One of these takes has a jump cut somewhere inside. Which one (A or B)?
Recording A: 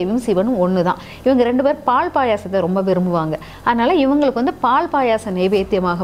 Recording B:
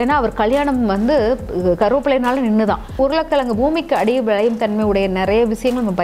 B